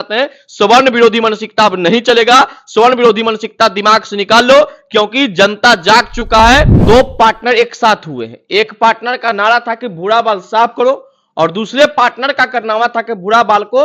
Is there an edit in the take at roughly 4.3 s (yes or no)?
no